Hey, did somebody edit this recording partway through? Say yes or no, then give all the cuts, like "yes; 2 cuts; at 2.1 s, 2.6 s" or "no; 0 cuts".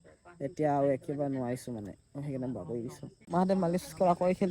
yes; 1 cut; at 3.2 s